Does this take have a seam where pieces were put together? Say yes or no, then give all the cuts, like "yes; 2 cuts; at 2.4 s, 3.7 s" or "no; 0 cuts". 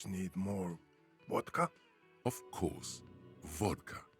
yes; 1 cut; at 2.0 s